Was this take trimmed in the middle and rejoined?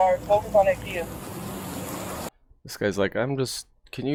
no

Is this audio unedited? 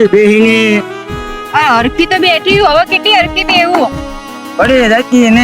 yes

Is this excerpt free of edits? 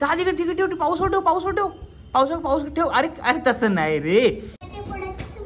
no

